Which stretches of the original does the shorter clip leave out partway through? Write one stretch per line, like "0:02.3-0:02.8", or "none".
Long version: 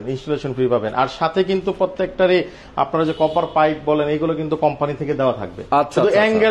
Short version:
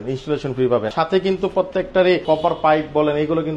0:00.9-0:01.1
0:02.5-0:03.1

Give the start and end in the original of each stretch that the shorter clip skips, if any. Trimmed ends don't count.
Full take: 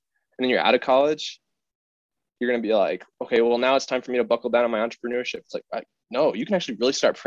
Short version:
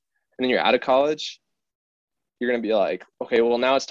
none

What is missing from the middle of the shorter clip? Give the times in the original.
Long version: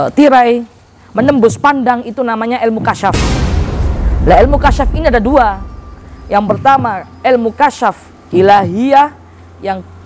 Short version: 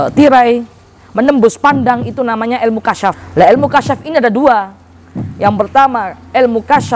0:03.2-0:04.1

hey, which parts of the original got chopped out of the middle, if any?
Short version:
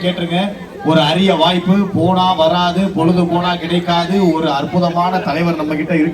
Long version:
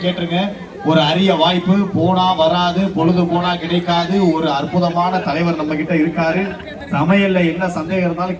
none

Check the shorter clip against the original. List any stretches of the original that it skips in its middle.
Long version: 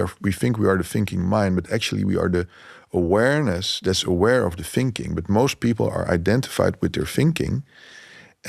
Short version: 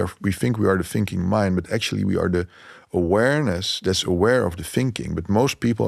none

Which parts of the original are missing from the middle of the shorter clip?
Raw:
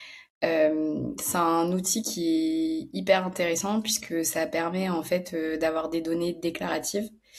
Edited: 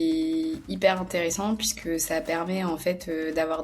none

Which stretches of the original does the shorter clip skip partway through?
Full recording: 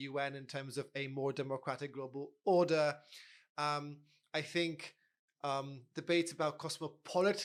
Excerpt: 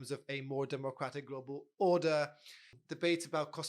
0:03.4-0:05.8

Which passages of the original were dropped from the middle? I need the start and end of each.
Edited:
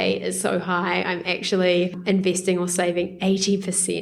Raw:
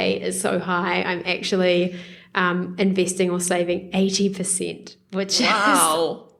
0:02.0-0:02.7

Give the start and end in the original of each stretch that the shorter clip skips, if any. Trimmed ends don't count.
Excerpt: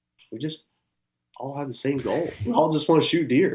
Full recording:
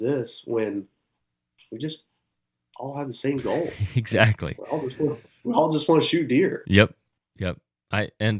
0:03.8-0:05.4

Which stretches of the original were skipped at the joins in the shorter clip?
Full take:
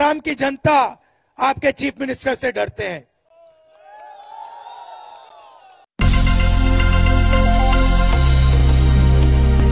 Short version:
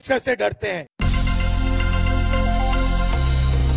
0:03.1-0:05.9

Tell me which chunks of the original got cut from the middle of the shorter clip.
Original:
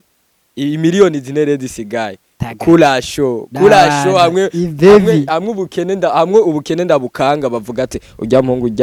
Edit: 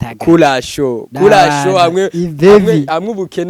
none

